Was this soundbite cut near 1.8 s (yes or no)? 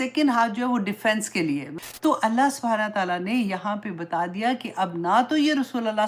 yes